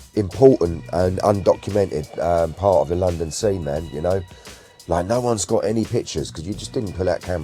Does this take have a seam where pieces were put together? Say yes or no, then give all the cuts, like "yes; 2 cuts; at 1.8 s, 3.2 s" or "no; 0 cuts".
no; 0 cuts